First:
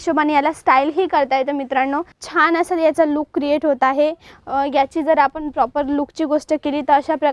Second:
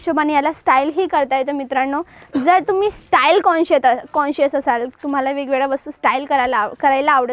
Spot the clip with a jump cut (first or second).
first